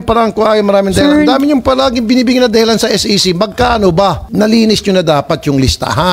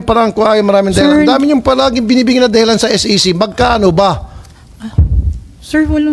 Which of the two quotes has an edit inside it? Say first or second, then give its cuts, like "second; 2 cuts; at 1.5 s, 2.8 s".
first; 1 cut; at 4.2 s